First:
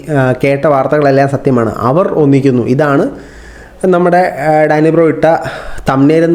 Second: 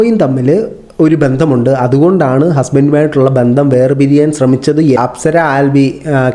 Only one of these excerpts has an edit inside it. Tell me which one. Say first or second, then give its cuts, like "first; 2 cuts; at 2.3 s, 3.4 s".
second; 1 cut; at 5.0 s